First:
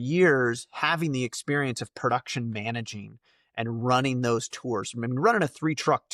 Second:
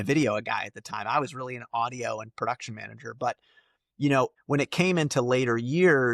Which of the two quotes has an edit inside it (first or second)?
second